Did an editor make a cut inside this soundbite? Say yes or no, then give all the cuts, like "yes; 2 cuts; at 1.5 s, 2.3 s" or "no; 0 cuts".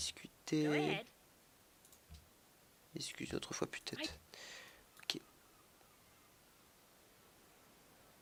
no; 0 cuts